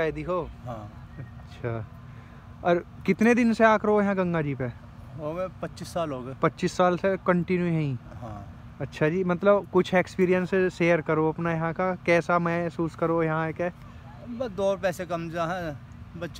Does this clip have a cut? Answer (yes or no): no